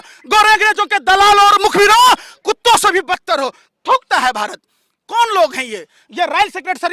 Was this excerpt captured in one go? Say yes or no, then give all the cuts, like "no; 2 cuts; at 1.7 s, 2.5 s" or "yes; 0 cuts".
yes; 0 cuts